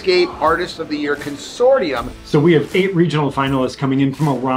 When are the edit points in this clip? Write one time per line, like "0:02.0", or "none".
0:02.1

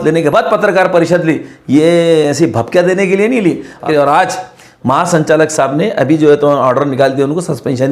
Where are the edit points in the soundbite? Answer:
0:03.8

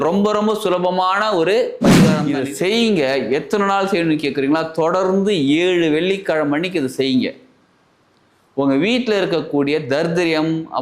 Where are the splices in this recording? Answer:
0:02.2

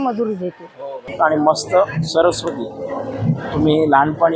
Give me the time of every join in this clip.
0:01.1

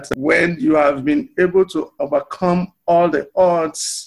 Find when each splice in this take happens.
none

